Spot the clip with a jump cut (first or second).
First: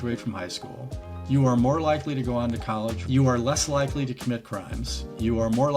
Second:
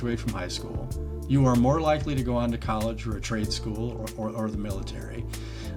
first